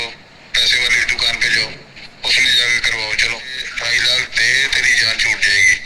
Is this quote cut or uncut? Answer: cut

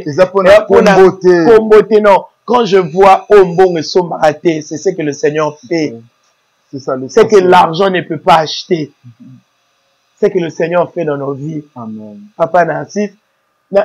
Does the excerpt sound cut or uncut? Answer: uncut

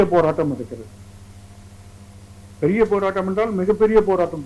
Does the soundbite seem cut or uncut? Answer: uncut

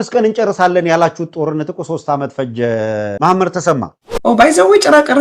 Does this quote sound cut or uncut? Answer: cut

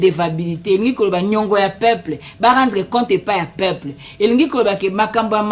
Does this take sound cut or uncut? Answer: uncut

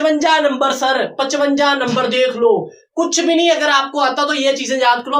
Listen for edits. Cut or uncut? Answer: uncut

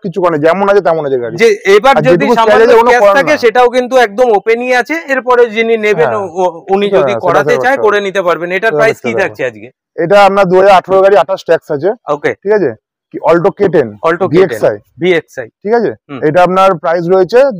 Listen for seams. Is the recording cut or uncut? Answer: uncut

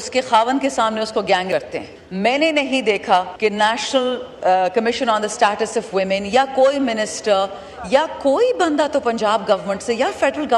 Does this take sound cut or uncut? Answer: cut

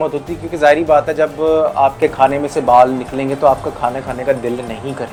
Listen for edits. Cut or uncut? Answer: uncut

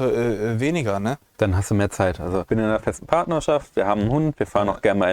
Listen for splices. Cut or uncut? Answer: cut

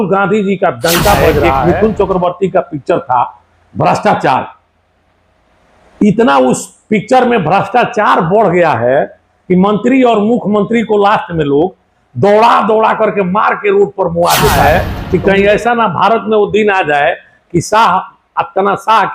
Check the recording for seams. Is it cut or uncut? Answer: cut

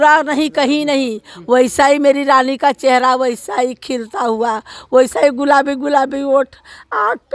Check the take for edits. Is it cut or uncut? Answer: uncut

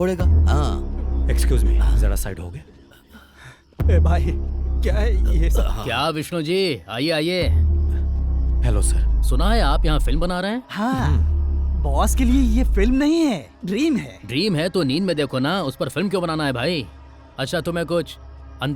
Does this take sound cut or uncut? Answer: uncut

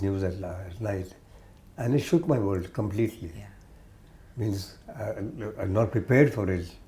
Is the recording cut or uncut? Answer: uncut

